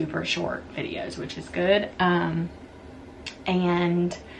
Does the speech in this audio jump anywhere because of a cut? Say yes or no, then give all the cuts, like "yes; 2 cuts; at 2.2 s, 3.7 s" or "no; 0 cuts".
no; 0 cuts